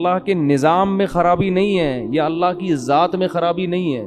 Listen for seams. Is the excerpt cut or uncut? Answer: uncut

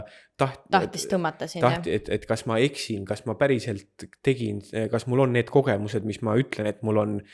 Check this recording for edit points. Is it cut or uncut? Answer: uncut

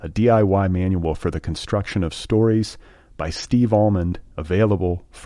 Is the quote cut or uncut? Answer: uncut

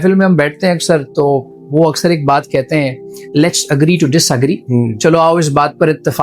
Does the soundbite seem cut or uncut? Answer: uncut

